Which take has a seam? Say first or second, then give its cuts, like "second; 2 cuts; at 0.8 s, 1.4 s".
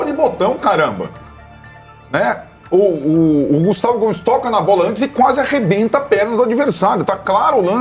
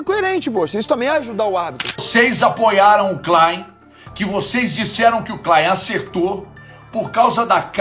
second; 1 cut; at 2.1 s